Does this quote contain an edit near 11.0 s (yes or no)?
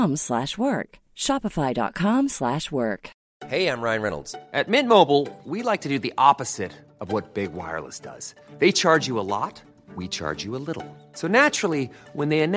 no